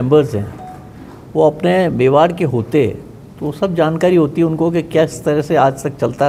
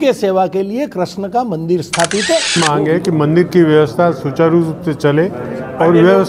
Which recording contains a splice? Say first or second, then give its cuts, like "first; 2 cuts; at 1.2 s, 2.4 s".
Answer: second; 1 cut; at 2.5 s